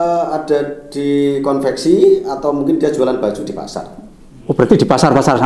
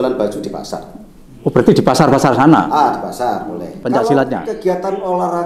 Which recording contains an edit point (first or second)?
second